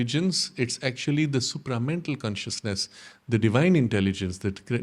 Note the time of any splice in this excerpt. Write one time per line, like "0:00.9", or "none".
none